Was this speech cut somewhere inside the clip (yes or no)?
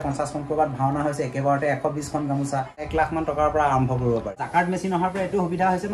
yes